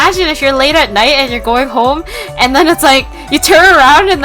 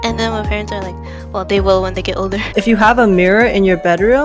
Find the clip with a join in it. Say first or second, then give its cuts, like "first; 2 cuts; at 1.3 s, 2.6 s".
second; 1 cut; at 2.4 s